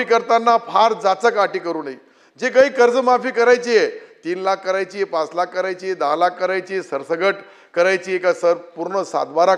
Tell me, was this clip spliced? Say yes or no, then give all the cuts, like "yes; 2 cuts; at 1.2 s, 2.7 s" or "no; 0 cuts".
no; 0 cuts